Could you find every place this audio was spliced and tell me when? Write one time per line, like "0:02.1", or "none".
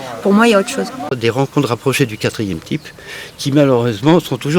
0:01.1

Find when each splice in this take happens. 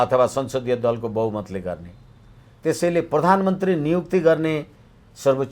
none

